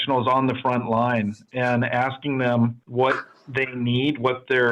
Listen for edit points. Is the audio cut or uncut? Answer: cut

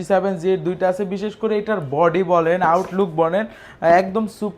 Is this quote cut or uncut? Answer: uncut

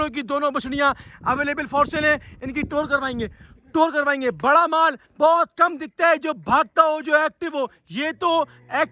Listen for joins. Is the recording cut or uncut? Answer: uncut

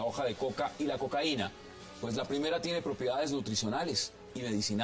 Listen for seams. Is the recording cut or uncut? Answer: uncut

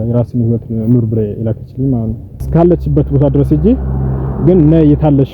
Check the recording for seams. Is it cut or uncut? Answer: cut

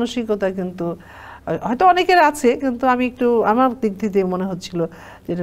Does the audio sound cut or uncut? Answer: uncut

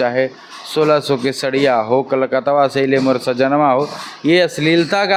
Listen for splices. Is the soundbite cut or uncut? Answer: uncut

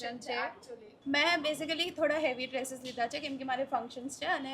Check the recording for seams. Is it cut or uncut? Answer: cut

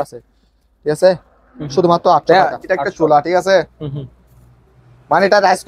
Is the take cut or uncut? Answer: cut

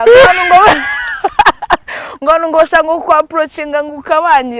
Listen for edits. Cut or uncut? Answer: uncut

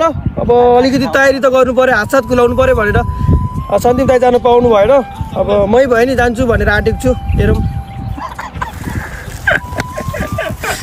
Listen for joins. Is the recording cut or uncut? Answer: uncut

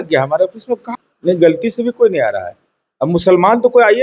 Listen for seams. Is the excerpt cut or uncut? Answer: cut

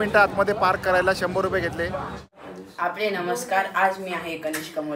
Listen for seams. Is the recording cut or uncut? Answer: cut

